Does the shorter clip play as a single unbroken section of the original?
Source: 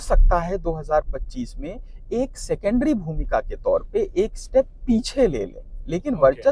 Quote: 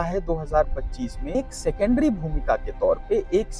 no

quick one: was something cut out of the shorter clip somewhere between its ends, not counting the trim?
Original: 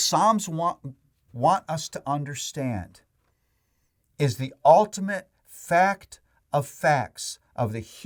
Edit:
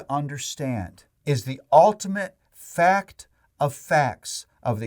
yes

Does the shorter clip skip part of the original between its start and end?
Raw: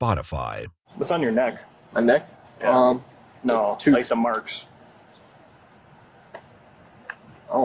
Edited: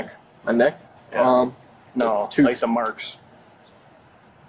no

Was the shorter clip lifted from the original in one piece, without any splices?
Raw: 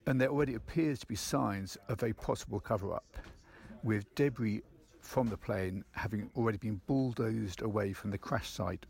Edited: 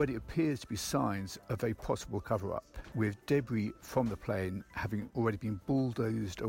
no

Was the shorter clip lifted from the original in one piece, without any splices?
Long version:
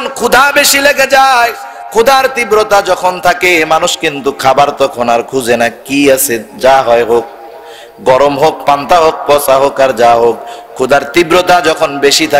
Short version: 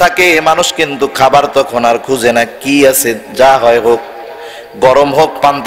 yes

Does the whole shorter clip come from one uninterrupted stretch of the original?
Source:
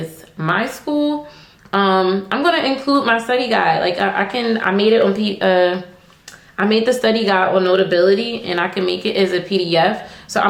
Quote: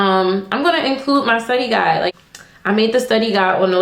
no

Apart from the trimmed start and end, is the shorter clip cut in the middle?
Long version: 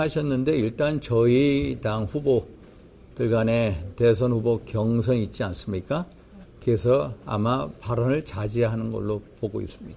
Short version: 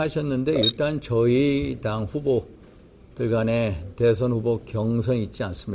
no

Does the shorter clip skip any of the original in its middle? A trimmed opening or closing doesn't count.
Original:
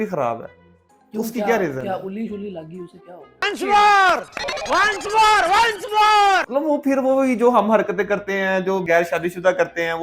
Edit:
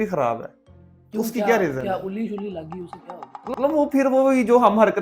yes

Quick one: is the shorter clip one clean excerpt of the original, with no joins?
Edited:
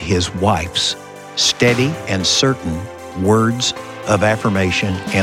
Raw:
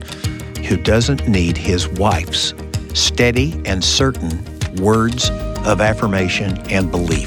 yes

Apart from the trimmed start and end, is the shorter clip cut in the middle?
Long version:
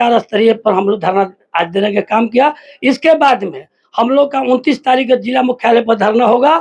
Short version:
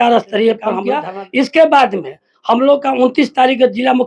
yes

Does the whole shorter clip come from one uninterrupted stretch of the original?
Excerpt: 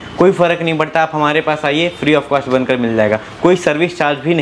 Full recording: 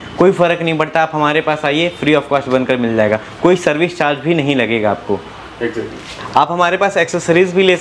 yes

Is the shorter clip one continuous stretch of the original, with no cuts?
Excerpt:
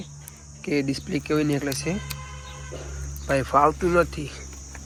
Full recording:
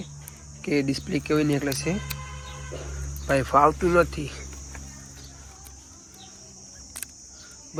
yes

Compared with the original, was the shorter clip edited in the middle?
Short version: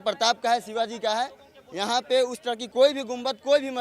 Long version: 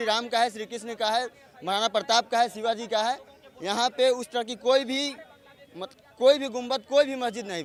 yes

